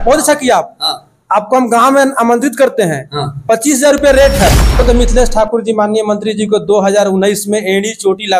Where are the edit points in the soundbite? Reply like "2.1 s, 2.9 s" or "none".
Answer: 4.8 s